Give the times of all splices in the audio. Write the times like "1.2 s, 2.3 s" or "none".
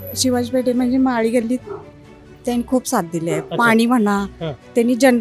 none